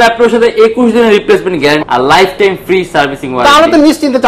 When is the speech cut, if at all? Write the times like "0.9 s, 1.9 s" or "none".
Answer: 1.8 s